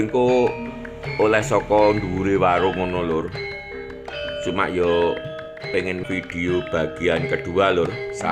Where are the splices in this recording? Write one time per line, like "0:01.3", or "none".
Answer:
0:06.0